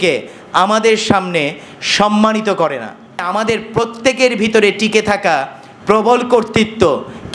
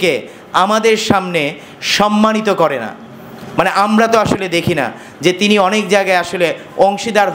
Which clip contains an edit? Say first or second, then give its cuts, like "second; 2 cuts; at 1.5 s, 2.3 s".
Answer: first; 1 cut; at 3.3 s